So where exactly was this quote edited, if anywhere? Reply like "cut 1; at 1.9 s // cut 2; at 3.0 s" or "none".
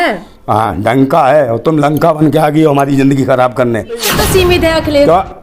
cut 1; at 4.1 s